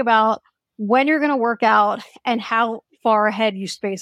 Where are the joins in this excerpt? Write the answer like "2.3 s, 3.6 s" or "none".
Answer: none